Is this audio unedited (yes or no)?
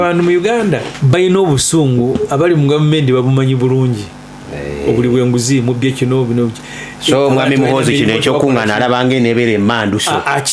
no